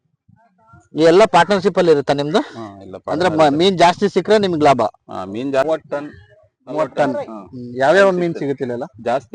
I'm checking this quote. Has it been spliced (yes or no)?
yes